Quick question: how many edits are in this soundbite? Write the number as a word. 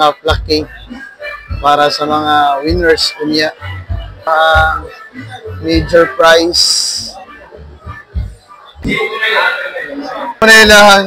two